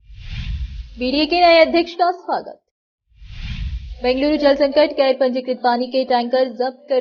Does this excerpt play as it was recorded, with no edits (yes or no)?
no